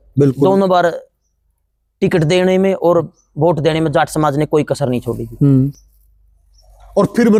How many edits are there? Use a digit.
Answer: 0